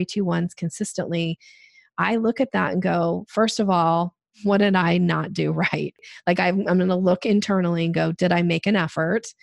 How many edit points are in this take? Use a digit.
2